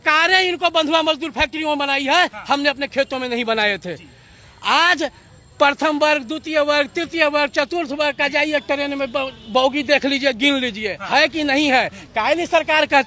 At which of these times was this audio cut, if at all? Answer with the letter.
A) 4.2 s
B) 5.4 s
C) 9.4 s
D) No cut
D